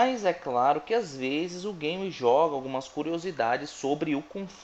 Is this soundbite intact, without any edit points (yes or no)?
yes